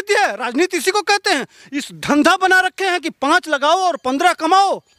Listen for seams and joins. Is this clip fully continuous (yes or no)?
yes